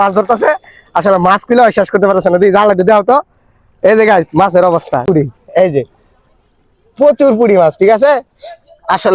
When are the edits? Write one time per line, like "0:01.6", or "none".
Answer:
0:05.0